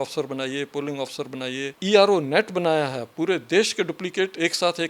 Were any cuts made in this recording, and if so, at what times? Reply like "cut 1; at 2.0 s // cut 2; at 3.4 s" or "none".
cut 1; at 1.7 s